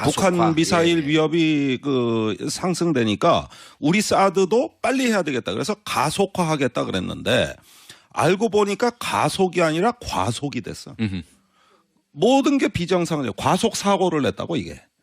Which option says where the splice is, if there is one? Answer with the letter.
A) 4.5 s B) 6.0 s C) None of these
A